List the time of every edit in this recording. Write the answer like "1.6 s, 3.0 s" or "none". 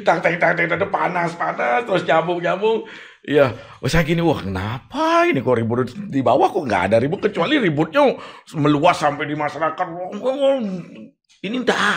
none